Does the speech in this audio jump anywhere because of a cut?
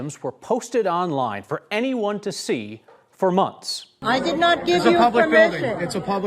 yes; 1 cut; at 3.9 s

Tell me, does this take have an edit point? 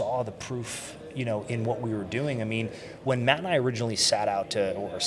no; 0 cuts

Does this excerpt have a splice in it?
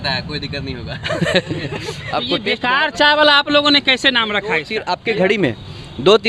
yes; 2 cuts; at 2.3 s, 4.7 s

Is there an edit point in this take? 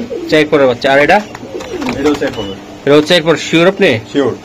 no; 0 cuts

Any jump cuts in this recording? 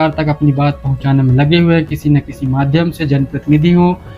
no; 0 cuts

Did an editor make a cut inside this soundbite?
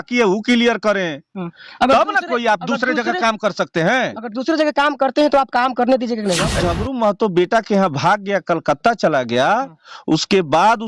yes; 1 cut; at 6.5 s

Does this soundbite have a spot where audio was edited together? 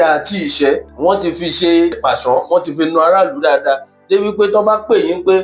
yes; 2 cuts; at 0.9 s, 2.0 s

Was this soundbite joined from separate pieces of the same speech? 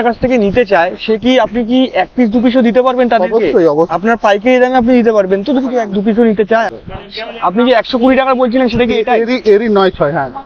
yes; 2 cuts; at 3.9 s, 6.7 s

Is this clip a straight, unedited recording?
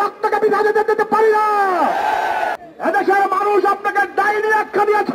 no; 1 cut; at 2.6 s

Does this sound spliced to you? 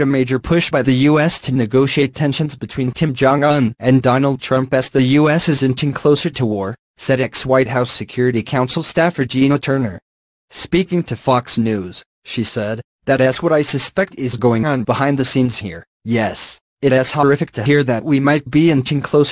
no; 0 cuts

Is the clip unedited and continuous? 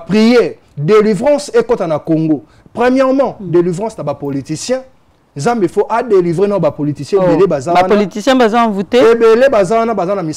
yes; 0 cuts

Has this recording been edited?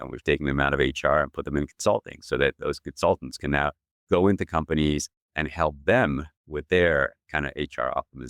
no; 0 cuts

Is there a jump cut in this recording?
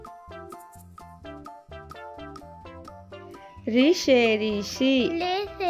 yes; 1 cut; at 3.6 s

